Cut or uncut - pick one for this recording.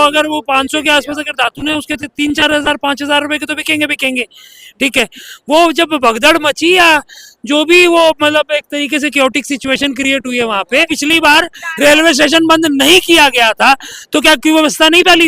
cut